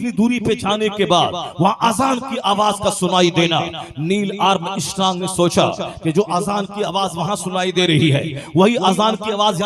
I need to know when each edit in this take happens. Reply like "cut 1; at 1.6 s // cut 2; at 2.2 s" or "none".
none